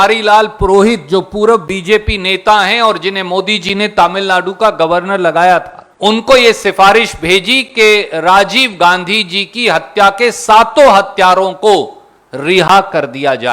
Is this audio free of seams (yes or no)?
no